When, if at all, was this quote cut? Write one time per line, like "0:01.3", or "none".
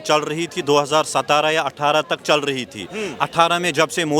none

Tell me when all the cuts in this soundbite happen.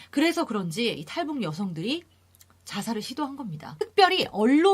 0:03.6

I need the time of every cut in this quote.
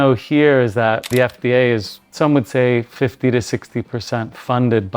0:01.1
0:02.0

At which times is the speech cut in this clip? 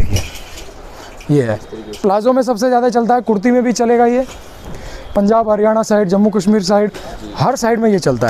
none

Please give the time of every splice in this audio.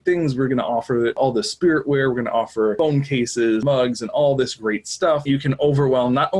0:01.2
0:02.8
0:03.6
0:05.2

